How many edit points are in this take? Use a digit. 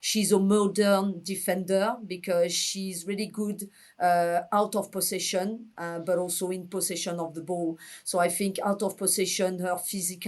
0